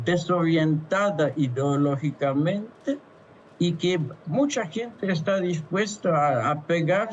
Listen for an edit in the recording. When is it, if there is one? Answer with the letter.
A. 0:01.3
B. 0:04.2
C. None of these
C